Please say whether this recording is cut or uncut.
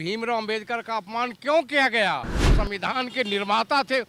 cut